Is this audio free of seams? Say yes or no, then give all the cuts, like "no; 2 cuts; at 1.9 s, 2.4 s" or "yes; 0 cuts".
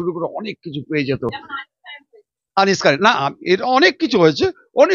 yes; 0 cuts